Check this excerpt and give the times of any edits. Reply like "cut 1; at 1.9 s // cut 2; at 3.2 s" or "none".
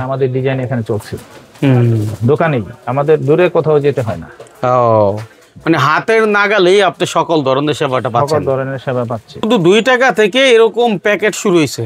cut 1; at 9.5 s